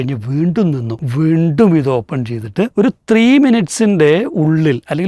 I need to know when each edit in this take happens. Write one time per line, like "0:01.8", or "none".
0:01.0
0:02.7